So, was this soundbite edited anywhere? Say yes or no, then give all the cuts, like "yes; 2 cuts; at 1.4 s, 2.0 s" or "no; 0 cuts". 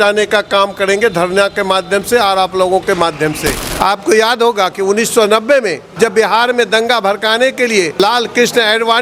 yes; 3 cuts; at 3.6 s, 5.8 s, 8.0 s